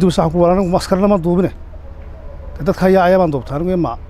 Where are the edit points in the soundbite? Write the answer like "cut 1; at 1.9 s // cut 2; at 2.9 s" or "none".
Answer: none